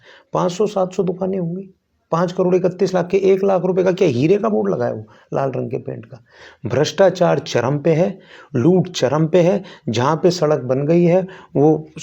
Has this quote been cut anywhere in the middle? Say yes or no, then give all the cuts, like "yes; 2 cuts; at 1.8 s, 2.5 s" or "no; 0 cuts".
no; 0 cuts